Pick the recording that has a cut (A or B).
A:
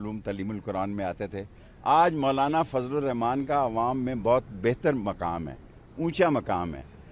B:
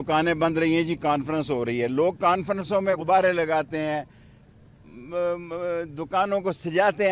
B